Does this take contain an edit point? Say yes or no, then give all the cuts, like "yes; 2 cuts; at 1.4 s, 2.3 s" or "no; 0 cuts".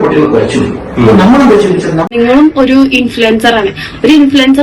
yes; 1 cut; at 2.1 s